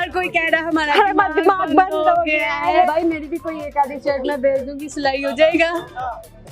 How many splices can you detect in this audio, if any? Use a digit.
1